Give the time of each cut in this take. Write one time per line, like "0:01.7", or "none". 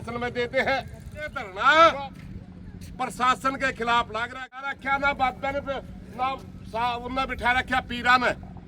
0:01.5
0:04.7